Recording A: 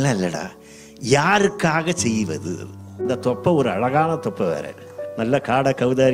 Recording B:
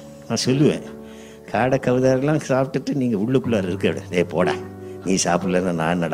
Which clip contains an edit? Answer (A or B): A